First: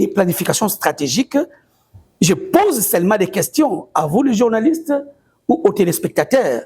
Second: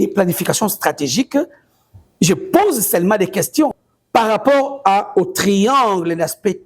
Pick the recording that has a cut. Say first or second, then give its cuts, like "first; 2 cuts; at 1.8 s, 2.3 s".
second; 1 cut; at 3.8 s